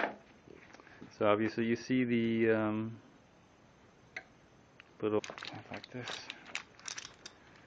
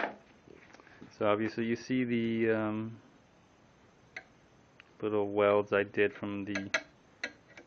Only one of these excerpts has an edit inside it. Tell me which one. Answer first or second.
second